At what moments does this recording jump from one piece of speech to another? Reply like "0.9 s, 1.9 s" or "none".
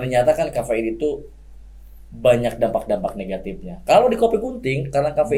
none

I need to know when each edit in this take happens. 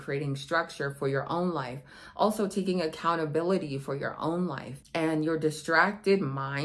4.7 s

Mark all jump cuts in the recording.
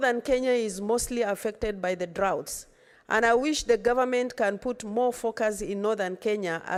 none

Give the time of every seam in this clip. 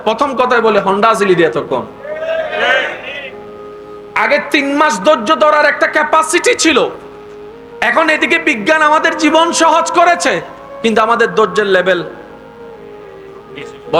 none

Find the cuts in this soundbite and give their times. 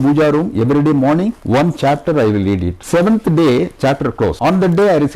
1.4 s, 2.7 s, 4.4 s

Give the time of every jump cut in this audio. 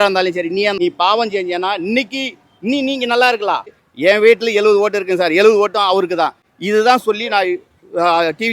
0.8 s, 3.8 s, 6.4 s

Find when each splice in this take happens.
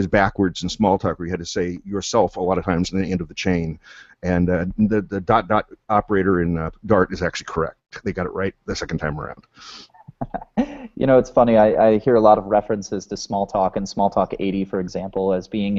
none

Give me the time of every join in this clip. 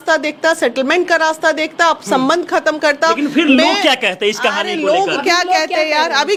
none

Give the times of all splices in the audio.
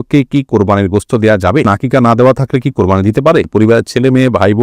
1.7 s, 3.5 s

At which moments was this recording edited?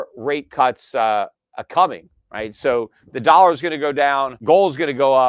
4.3 s

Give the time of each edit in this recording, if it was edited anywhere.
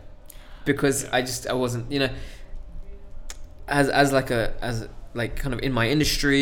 none

